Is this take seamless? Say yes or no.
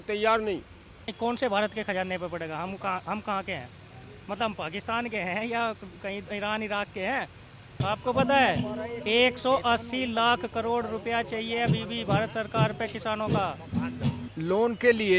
no